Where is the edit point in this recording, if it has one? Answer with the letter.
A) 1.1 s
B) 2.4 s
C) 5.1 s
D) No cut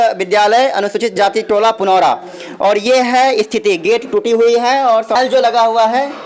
C